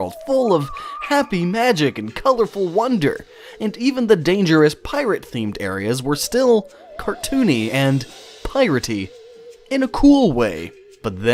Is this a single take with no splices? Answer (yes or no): yes